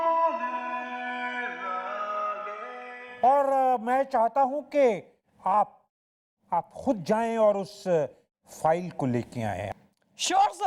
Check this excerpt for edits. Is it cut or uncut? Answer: uncut